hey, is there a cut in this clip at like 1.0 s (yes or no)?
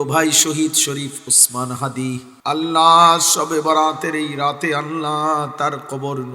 no